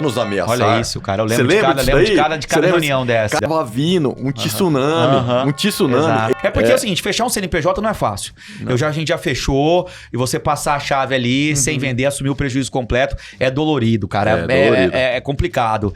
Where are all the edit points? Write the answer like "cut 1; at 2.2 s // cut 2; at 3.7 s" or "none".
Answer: cut 1; at 3.4 s // cut 2; at 6.3 s